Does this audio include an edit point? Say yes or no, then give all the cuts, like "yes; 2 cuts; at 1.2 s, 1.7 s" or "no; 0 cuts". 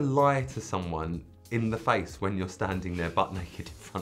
no; 0 cuts